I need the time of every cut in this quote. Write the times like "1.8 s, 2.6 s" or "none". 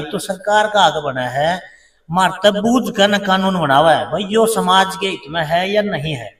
none